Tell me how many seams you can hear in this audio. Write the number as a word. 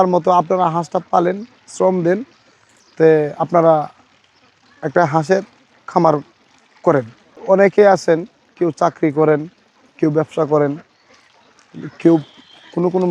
one